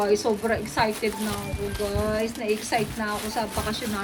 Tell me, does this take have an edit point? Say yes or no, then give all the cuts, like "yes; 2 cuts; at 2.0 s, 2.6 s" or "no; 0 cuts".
no; 0 cuts